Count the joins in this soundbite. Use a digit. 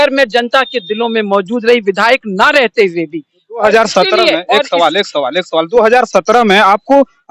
0